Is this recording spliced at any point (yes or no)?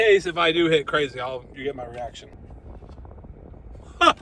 yes